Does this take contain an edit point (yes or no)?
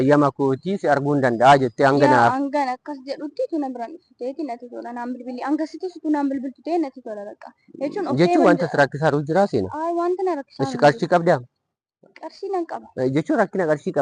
no